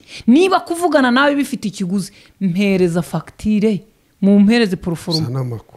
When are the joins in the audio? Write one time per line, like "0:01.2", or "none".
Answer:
none